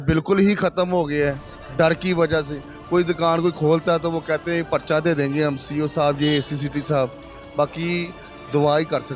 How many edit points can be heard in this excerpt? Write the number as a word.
zero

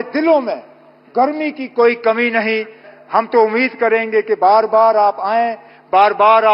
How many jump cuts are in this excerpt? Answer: one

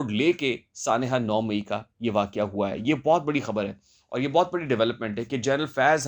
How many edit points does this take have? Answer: zero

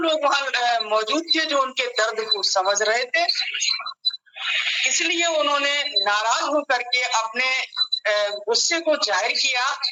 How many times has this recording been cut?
zero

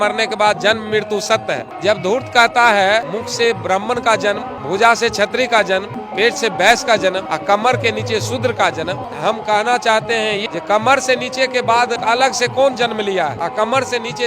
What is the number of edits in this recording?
nine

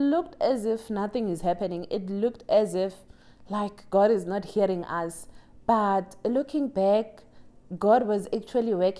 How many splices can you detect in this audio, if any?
zero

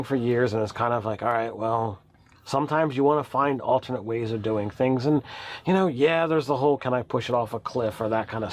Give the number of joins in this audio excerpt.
one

